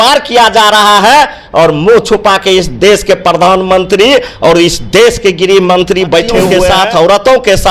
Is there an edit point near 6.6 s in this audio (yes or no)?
yes